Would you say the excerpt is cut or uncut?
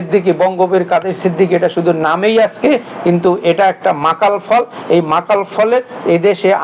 uncut